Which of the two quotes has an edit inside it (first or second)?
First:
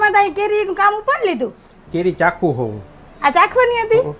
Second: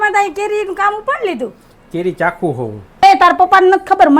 second